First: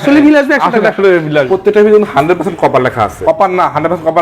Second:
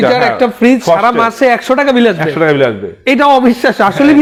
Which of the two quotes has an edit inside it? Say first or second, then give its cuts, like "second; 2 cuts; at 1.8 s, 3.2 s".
first; 2 cuts; at 1.5 s, 3.2 s